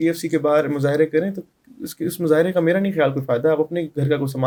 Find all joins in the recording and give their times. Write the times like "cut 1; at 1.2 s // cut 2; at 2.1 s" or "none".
none